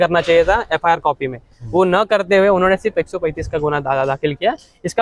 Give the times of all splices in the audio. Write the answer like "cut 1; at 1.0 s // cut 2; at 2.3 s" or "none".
none